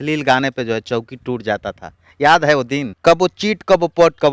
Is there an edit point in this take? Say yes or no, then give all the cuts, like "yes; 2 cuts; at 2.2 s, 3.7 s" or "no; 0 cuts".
yes; 1 cut; at 2.9 s